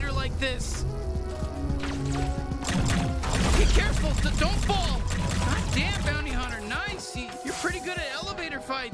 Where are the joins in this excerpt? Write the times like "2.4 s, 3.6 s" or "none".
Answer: none